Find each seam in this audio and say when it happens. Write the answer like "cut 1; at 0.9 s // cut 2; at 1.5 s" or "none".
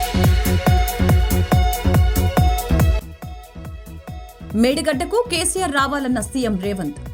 none